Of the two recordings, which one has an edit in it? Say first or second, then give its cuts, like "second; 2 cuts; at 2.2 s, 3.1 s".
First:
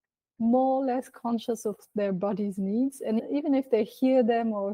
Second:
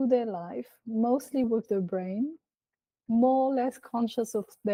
first; 1 cut; at 3.2 s